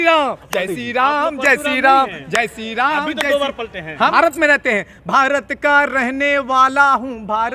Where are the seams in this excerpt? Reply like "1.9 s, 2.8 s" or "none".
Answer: 4.1 s